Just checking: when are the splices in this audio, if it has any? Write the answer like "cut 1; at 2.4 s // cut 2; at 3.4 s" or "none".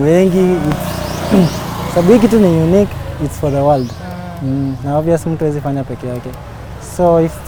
none